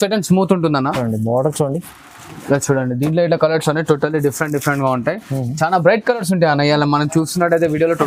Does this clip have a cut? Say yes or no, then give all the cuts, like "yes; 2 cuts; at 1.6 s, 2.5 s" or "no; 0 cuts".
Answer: no; 0 cuts